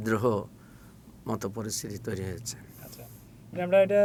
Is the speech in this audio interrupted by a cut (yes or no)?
no